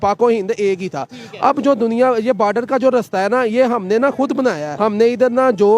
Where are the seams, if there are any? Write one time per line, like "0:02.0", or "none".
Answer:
0:04.7